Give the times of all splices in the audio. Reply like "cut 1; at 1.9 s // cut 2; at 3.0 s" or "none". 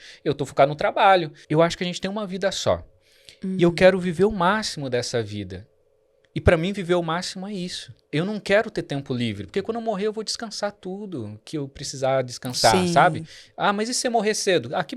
cut 1; at 1.4 s // cut 2; at 8.0 s